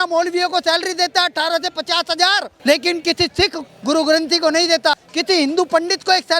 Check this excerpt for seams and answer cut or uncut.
cut